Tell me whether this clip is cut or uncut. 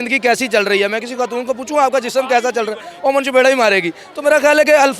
uncut